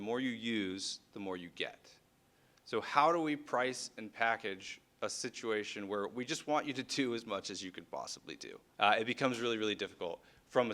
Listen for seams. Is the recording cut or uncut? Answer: uncut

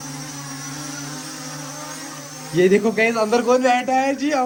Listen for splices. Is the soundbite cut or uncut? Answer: uncut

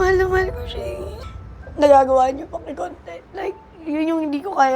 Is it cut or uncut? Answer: cut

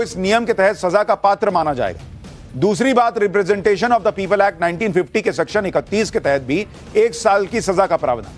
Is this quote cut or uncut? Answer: uncut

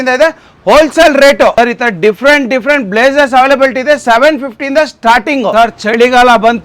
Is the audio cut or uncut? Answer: cut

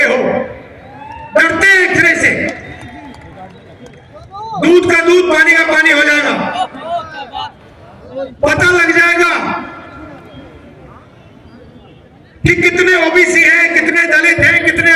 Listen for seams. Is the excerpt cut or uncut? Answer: uncut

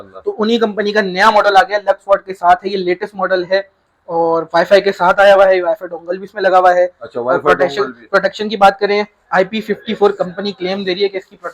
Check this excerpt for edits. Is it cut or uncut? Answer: uncut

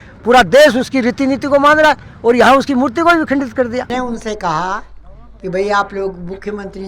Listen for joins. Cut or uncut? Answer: cut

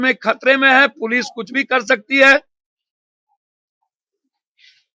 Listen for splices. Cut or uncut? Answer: uncut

